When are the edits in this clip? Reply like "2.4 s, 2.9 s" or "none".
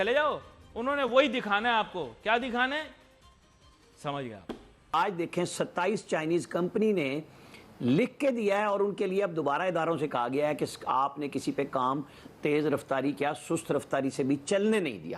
4.7 s